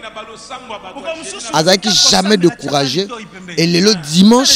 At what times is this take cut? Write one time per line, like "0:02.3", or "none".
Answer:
0:01.5